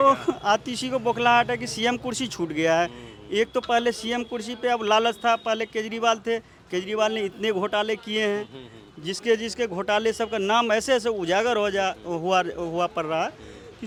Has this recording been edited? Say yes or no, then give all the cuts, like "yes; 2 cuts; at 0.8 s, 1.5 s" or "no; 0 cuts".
no; 0 cuts